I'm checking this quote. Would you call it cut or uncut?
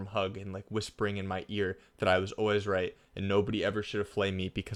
uncut